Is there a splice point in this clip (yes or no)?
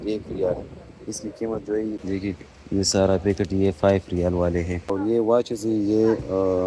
yes